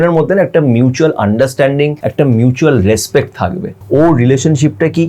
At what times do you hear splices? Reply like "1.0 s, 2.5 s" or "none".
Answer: 2.0 s, 3.8 s